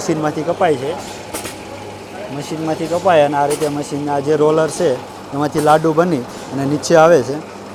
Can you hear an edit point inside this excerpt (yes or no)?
no